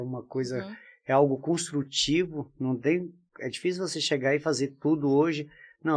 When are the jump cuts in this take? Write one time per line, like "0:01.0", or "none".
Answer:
none

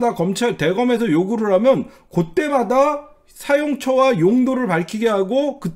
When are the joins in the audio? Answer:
none

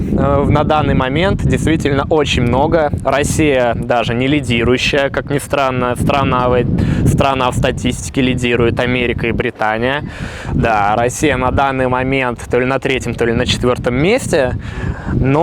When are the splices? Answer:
none

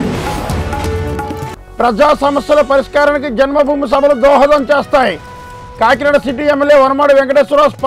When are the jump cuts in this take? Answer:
0:01.4

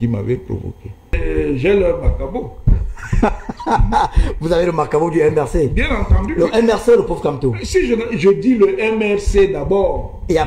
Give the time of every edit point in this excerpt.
0:01.2

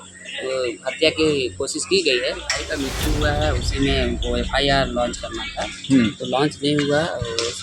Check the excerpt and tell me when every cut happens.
0:02.5

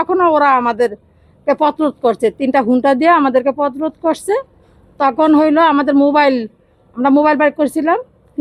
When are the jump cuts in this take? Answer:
none

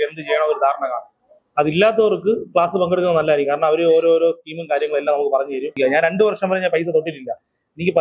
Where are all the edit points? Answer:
0:05.7

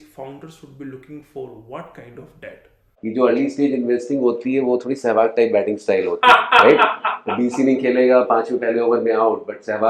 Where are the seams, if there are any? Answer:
0:02.9

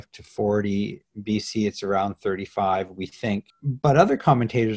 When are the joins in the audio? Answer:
0:03.6

